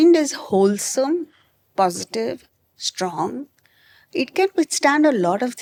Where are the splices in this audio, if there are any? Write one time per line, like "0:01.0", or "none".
none